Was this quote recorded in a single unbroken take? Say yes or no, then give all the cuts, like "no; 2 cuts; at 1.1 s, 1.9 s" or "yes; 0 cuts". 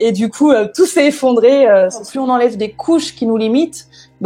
no; 1 cut; at 2.1 s